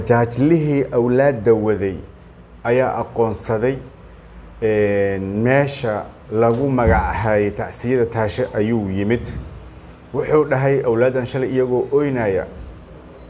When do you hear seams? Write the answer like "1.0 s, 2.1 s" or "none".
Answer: none